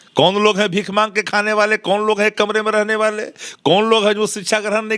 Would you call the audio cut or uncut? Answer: uncut